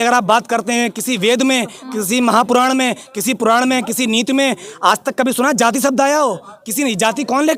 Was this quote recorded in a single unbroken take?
yes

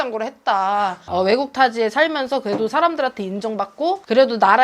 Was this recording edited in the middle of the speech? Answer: no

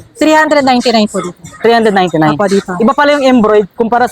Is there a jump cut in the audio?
no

